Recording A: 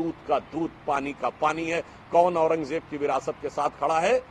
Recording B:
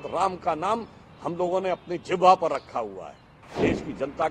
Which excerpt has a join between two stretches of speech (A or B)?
B